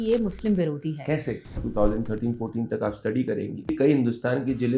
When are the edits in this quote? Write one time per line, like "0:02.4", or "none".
0:01.6
0:03.8